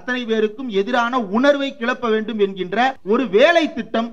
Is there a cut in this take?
yes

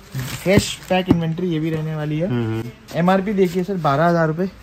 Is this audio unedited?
yes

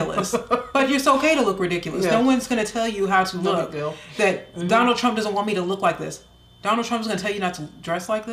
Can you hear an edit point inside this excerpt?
no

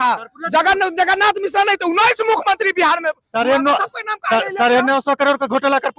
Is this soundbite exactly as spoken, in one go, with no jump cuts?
yes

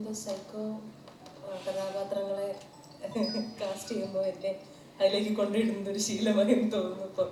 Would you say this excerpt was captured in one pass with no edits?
yes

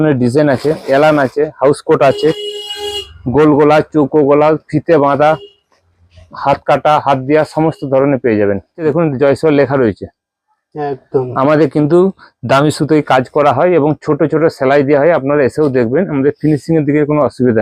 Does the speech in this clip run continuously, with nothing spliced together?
no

